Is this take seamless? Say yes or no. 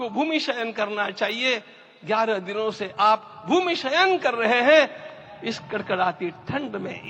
yes